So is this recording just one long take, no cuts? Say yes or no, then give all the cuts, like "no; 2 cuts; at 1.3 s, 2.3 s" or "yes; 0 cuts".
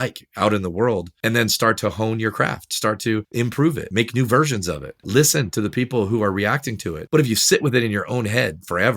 no; 3 cuts; at 1.6 s, 3.7 s, 7.0 s